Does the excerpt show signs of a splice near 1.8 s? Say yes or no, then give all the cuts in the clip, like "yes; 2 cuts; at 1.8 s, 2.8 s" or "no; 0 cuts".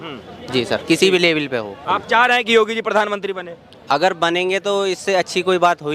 yes; 1 cut; at 1.8 s